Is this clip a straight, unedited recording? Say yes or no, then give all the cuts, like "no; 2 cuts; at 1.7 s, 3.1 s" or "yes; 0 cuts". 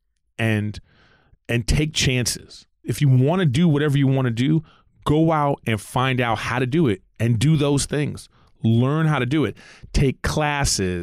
no; 1 cut; at 2.9 s